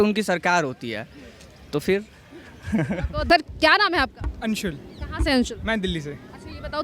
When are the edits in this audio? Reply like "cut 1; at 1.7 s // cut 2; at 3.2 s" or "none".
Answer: none